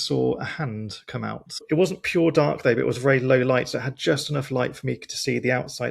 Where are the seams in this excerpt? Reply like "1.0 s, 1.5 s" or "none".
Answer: none